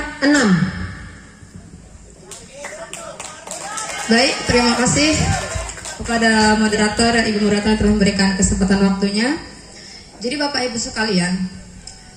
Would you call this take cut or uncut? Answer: uncut